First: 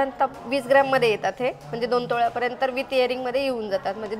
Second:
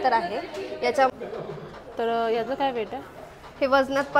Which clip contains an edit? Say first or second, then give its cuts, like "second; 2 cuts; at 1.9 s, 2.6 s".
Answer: second; 1 cut; at 1.1 s